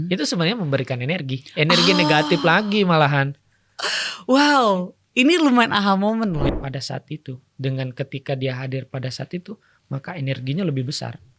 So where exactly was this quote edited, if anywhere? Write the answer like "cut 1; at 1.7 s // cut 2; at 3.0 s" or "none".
cut 1; at 6.5 s